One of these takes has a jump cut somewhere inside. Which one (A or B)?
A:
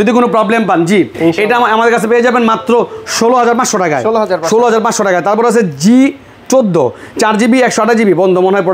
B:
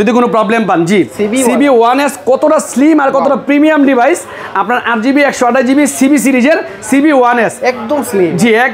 B